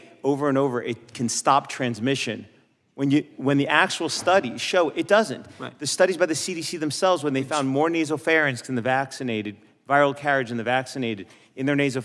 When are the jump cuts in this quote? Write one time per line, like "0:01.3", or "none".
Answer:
none